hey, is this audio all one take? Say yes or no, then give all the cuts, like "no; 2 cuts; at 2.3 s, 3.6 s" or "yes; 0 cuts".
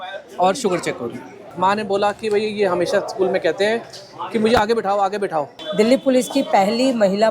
no; 2 cuts; at 1.5 s, 5.6 s